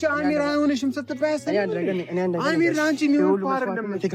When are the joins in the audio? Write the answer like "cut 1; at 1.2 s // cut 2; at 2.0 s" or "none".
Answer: none